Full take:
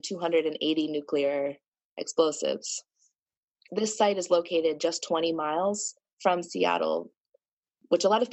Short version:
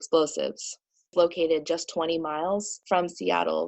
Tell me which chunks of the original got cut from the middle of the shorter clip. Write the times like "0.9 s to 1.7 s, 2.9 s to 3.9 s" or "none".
3.1 s to 4.2 s, 5.9 s to 6.1 s